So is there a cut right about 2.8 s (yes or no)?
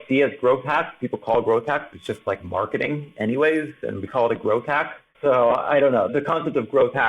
no